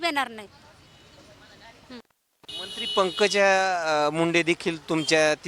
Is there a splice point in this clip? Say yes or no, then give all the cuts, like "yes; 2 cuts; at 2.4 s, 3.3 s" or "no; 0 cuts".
no; 0 cuts